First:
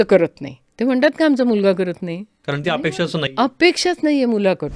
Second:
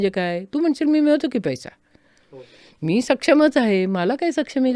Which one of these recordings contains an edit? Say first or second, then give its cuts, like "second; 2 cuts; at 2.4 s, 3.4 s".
first; 1 cut; at 2.3 s